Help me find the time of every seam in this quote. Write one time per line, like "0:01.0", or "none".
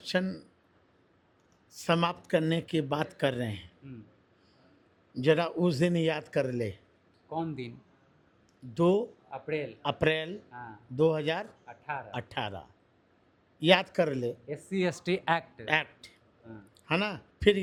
none